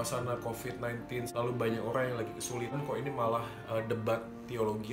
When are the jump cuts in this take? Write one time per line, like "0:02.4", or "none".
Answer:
0:01.3
0:02.8